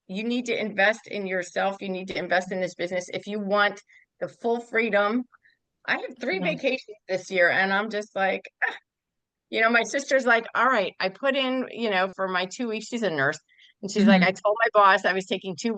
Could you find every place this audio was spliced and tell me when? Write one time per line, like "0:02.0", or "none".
none